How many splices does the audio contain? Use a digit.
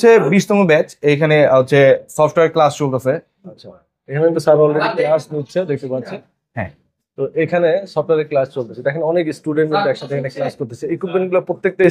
0